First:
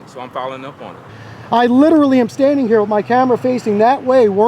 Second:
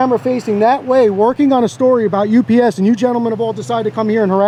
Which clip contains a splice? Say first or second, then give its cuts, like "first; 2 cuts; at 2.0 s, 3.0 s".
first; 1 cut; at 0.9 s